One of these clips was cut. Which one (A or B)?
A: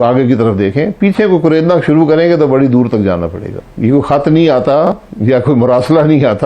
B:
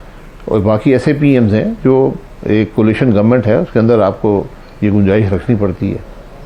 A